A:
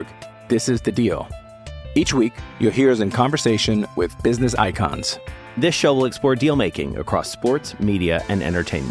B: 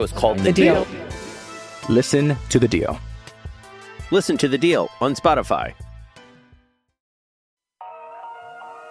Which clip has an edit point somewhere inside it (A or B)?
B